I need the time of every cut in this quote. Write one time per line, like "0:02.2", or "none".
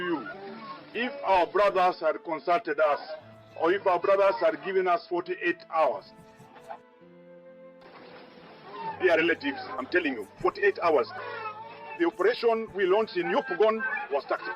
none